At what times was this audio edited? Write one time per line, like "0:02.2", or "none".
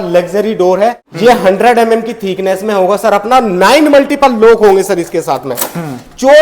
0:01.1